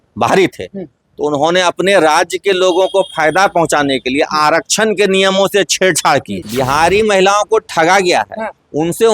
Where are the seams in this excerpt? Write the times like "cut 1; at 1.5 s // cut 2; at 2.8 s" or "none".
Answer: cut 1; at 6.4 s